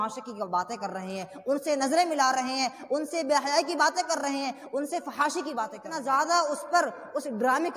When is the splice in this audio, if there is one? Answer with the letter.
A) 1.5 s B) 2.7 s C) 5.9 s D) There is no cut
C